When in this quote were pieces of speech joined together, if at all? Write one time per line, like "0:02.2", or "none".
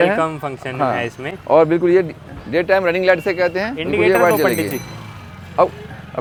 none